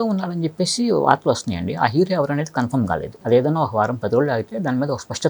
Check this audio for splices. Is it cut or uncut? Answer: cut